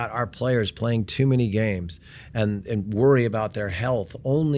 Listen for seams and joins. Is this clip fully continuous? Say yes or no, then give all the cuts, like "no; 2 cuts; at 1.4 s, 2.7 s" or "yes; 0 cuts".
yes; 0 cuts